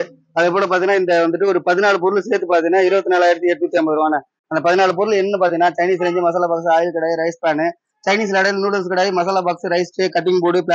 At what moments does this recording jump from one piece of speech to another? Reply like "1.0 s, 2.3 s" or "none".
none